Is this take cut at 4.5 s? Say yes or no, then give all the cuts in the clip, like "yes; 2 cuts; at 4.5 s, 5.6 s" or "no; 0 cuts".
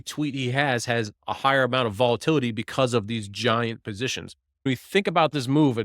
yes; 1 cut; at 4.5 s